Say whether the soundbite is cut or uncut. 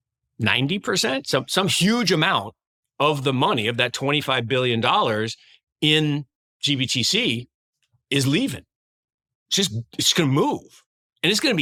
uncut